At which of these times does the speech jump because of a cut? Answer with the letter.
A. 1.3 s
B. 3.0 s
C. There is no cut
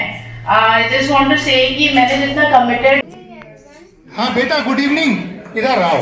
B